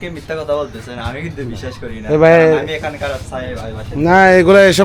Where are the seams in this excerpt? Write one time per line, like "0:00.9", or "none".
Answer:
none